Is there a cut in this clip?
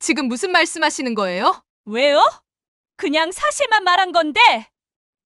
yes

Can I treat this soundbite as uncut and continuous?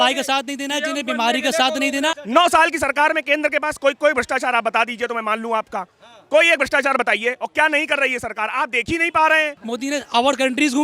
no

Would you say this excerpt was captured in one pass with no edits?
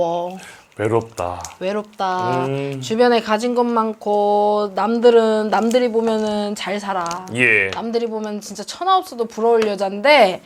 yes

